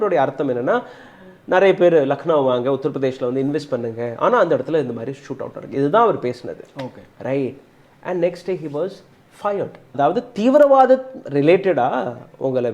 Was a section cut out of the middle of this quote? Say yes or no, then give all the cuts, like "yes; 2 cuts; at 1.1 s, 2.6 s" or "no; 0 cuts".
yes; 1 cut; at 9.9 s